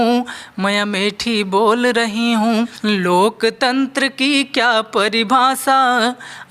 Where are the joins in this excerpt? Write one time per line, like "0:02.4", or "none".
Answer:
0:02.7